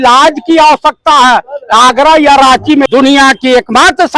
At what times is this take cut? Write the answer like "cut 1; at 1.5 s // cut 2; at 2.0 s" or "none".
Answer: cut 1; at 2.9 s